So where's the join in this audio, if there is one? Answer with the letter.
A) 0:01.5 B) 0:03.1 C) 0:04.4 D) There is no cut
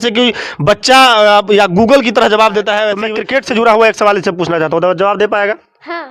B